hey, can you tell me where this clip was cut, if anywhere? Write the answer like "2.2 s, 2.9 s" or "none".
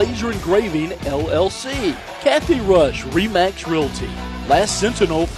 2.1 s